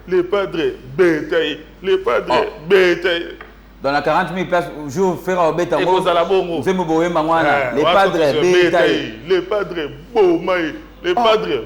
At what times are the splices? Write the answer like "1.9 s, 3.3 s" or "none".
none